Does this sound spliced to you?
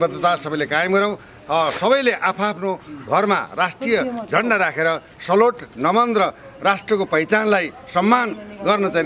no; 0 cuts

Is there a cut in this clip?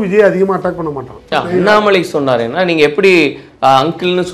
yes; 1 cut; at 1.3 s

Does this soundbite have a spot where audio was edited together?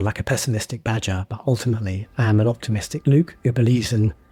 no; 0 cuts

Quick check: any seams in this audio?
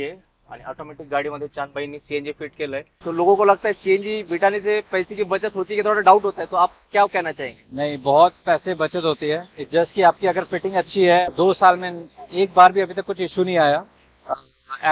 yes; 2 cuts; at 2.9 s, 11.3 s

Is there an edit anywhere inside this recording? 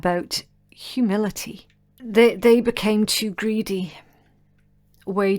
yes; 1 cut; at 2.0 s

